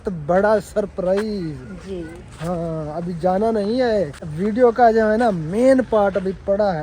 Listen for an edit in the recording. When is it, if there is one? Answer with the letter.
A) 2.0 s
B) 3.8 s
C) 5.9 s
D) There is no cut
D